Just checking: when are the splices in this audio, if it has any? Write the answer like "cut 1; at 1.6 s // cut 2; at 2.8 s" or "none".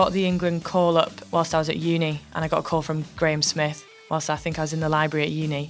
cut 1; at 1.2 s

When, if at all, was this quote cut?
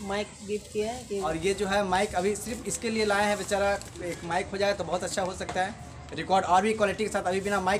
cut 1; at 1.2 s

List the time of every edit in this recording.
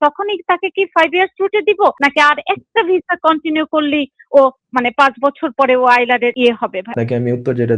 cut 1; at 2.0 s // cut 2; at 6.7 s

